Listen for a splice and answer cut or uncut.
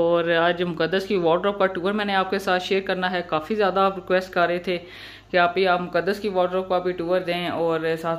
uncut